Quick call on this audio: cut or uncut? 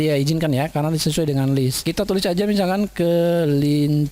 cut